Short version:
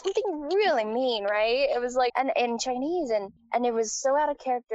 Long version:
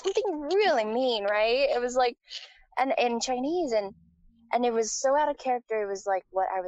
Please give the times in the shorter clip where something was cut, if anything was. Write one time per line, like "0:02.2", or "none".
0:02.1
0:03.4

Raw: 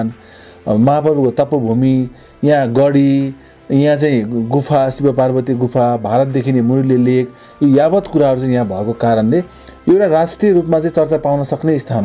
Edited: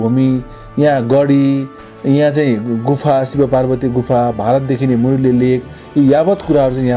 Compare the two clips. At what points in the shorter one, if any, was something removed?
none

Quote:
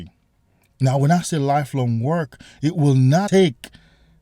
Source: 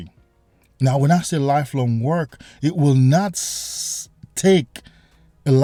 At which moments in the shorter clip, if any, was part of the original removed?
0:03.3

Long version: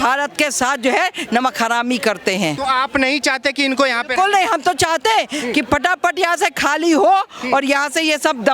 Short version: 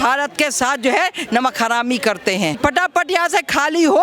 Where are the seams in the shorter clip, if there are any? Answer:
0:02.6

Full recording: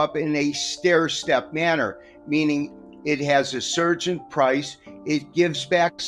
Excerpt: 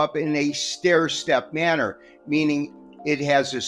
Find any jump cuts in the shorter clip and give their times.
none

